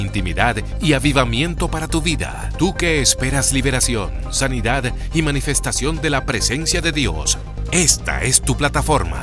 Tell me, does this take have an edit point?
no; 0 cuts

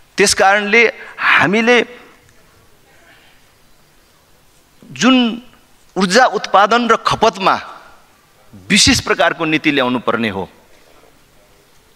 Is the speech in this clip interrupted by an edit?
no; 0 cuts

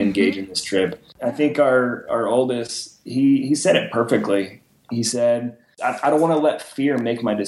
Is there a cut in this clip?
yes; 2 cuts; at 1.1 s, 5.7 s

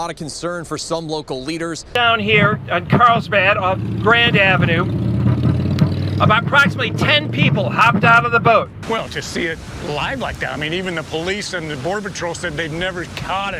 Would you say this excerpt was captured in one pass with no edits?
yes; 0 cuts

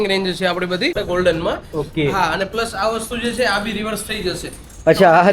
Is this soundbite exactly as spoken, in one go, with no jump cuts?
no; 1 cut; at 1.0 s

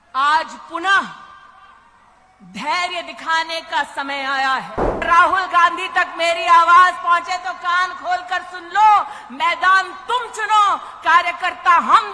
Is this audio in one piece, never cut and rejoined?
no; 1 cut; at 5.0 s

